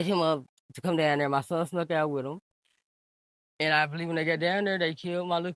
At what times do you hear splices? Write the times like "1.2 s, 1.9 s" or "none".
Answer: none